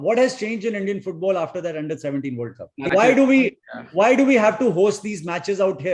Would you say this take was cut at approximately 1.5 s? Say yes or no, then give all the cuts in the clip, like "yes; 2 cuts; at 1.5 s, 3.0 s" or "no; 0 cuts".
no; 1 cut; at 2.9 s